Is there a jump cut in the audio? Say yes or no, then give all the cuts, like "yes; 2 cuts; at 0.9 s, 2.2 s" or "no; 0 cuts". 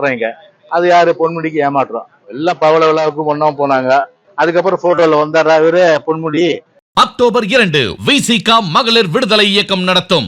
yes; 2 cuts; at 4.2 s, 6.7 s